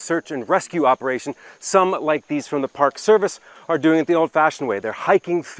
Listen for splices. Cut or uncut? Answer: uncut